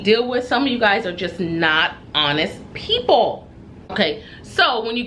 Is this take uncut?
no; 1 cut; at 3.9 s

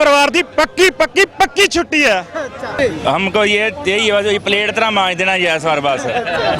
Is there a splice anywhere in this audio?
yes; 1 cut; at 2.8 s

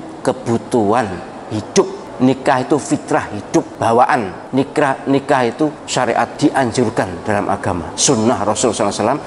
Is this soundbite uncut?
no; 5 cuts; at 2.0 s, 3.7 s, 4.4 s, 6.2 s, 7.9 s

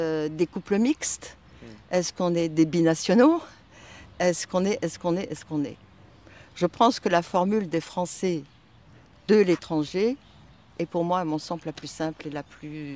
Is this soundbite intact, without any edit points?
yes; 0 cuts

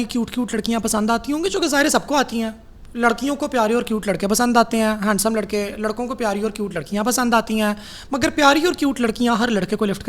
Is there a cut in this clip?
no; 0 cuts

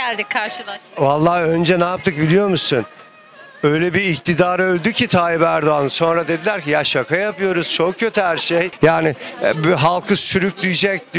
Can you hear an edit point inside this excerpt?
yes; 1 cut; at 8.7 s

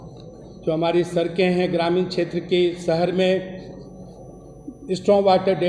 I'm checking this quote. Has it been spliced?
no; 0 cuts

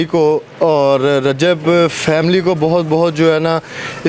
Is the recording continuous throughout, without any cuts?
yes; 0 cuts

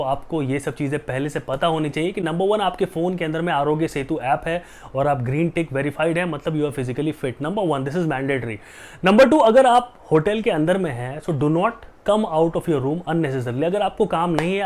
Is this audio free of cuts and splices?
yes; 0 cuts

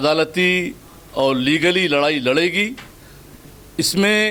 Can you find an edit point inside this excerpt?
no; 0 cuts

